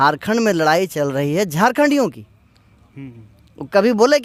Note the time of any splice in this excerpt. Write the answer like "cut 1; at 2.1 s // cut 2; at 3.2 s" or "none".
none